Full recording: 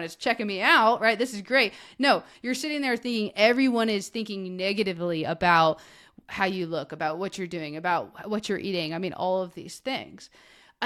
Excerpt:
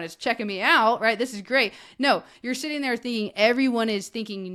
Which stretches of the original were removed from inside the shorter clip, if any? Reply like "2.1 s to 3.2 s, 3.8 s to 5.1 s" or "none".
none